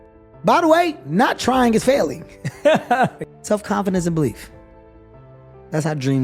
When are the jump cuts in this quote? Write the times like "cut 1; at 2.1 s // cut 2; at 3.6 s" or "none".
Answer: cut 1; at 3.2 s